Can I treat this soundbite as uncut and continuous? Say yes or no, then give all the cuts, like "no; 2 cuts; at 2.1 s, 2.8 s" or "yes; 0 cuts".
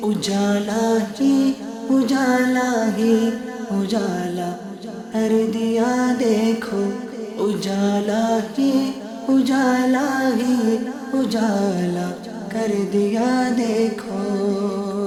yes; 0 cuts